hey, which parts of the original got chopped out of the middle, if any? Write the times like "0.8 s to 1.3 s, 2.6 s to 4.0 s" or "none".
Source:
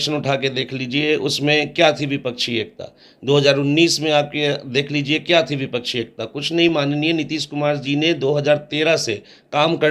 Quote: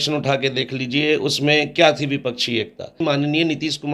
3.0 s to 6.7 s